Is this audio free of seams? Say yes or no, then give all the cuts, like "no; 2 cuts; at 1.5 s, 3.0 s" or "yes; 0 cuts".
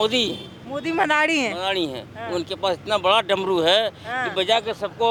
yes; 0 cuts